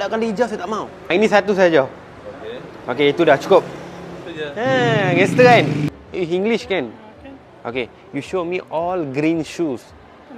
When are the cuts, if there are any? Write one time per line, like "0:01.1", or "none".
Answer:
0:01.0
0:05.9